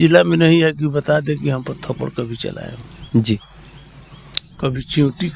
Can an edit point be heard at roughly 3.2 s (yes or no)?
no